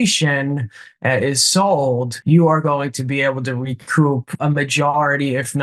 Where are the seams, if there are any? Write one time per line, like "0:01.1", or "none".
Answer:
0:02.1
0:04.3